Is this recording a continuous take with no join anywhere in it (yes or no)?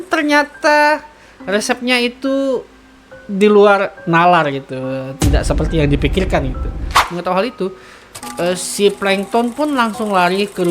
no